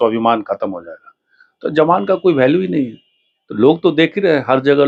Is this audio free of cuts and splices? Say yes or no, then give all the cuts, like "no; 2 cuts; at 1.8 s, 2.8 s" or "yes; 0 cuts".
yes; 0 cuts